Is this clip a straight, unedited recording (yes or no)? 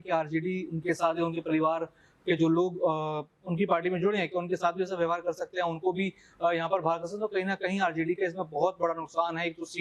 yes